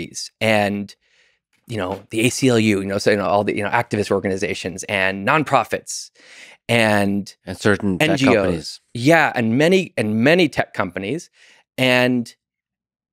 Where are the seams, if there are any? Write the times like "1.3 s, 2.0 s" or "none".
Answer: none